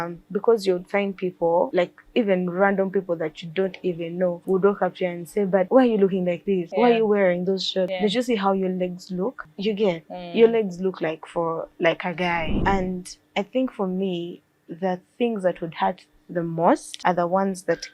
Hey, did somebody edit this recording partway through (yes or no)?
yes